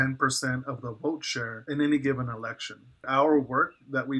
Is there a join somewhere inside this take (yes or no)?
yes